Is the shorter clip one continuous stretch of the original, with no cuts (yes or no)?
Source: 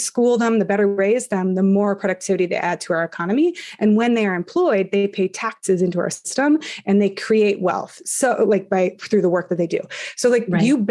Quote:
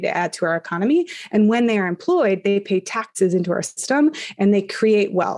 yes